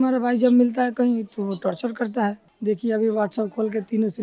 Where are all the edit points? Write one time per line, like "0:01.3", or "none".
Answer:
0:02.5